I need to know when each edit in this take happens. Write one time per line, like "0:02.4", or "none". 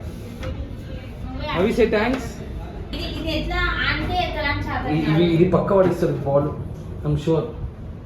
0:02.9